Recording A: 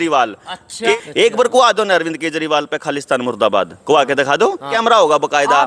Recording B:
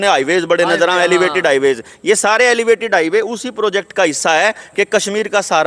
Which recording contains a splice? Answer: A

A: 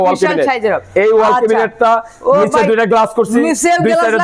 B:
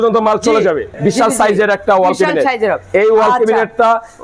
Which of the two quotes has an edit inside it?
B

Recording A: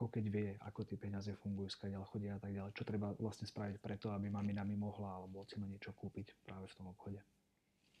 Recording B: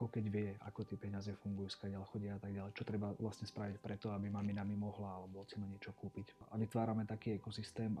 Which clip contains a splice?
B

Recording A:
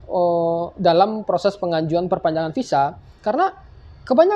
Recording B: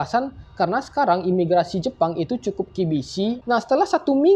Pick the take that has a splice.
B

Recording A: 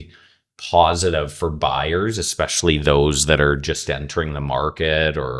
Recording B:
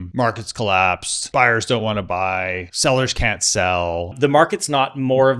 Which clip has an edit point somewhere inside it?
B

